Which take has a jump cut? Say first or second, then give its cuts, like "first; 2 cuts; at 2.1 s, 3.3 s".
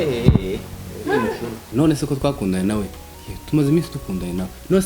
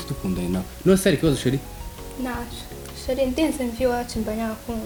first; 1 cut; at 1.6 s